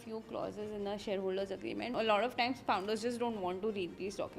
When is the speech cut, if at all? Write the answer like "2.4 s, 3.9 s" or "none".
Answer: 1.9 s